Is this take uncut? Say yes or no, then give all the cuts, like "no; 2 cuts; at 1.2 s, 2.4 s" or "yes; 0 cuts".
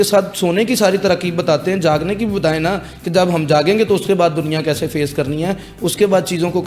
yes; 0 cuts